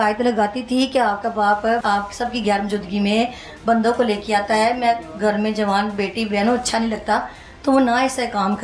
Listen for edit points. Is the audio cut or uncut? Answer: cut